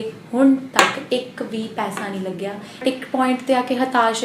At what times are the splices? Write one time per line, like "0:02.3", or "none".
0:02.8

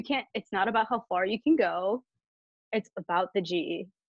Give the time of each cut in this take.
none

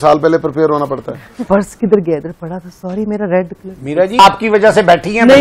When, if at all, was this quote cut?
0:01.4
0:04.2

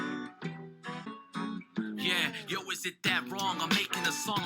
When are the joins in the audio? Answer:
0:01.1

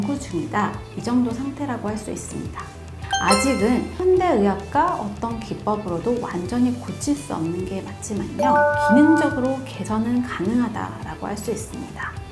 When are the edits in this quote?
0:02.9

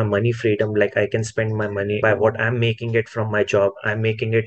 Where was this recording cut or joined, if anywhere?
0:02.0

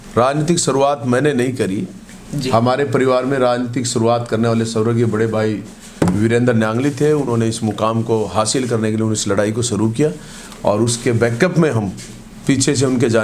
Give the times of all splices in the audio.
none

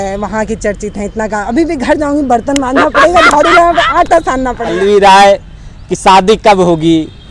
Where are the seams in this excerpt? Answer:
0:04.7

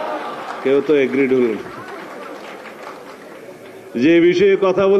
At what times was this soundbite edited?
none

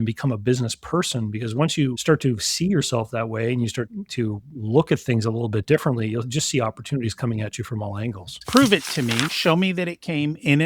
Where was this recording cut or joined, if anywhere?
0:08.4

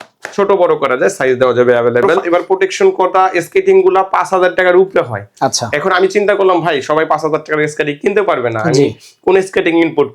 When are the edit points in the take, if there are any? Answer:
0:02.2

